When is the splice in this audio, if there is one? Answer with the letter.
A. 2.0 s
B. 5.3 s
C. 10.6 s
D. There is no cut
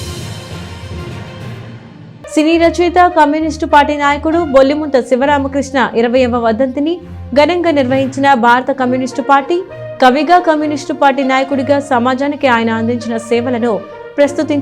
A